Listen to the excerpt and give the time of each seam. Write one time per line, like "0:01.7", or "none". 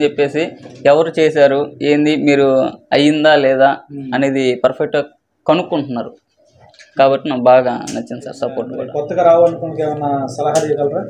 0:08.8